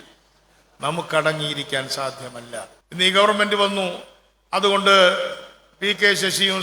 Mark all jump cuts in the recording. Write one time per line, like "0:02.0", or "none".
0:02.8